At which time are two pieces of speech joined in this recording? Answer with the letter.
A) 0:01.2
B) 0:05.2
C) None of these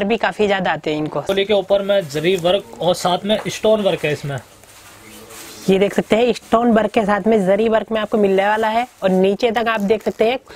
A